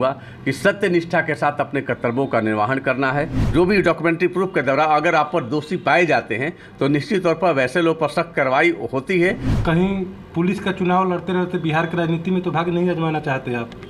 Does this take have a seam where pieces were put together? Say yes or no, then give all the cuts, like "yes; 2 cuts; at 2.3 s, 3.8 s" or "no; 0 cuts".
yes; 2 cuts; at 3.4 s, 9.5 s